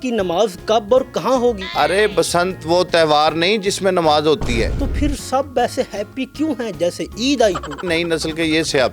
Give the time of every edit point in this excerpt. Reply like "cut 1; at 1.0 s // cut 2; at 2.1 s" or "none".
cut 1; at 1.6 s // cut 2; at 4.8 s // cut 3; at 7.8 s